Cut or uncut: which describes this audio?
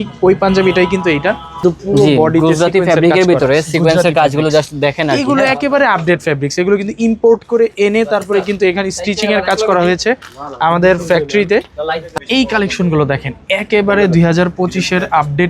cut